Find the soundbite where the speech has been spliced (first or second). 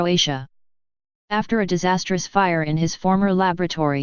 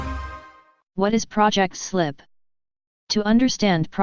first